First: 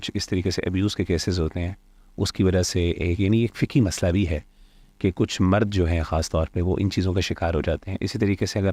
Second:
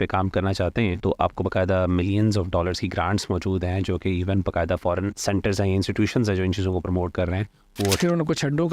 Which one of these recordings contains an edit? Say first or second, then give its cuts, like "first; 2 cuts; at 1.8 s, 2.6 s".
second; 3 cuts; at 1.0 s, 5.2 s, 8.0 s